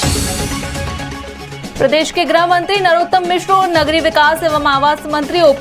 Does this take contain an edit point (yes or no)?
yes